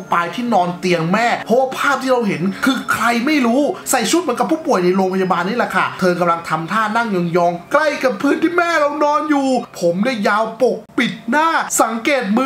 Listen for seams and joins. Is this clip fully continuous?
no; 2 cuts; at 1.4 s, 3.8 s

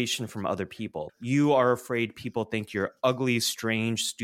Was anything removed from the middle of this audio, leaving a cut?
yes; 1 cut; at 1.1 s

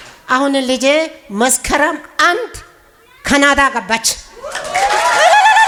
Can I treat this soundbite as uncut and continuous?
yes; 0 cuts

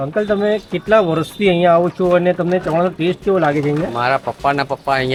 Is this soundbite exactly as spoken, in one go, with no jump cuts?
yes; 0 cuts

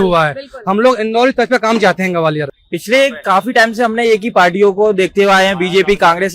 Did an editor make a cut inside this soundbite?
yes; 1 cut; at 2.6 s

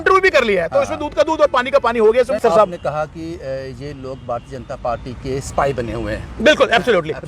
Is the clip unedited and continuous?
no; 1 cut; at 2.4 s

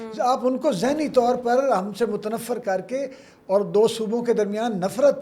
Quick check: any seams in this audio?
no; 0 cuts

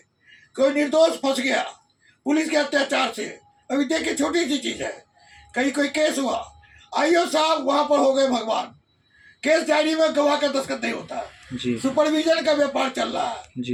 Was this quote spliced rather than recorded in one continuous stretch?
no; 0 cuts

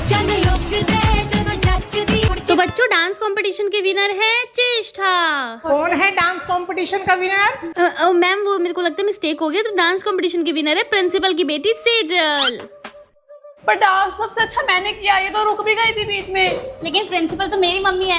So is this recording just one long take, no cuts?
yes; 0 cuts

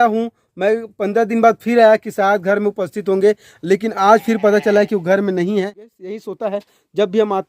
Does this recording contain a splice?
yes; 1 cut; at 6.0 s

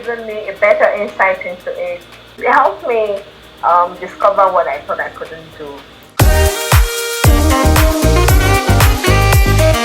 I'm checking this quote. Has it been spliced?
yes; 2 cuts; at 2.3 s, 6.0 s

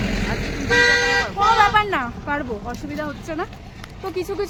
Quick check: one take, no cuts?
yes; 0 cuts

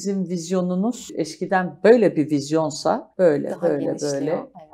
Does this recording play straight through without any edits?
no; 2 cuts; at 1.1 s, 3.1 s

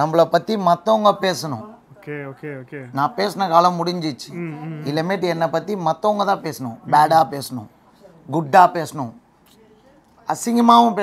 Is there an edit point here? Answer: no; 0 cuts

